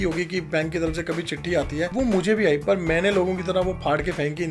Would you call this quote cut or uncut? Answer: cut